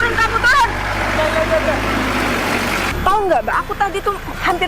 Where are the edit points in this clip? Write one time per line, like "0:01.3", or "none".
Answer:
0:02.9